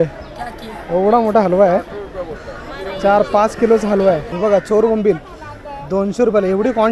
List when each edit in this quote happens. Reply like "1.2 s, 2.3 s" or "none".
4.3 s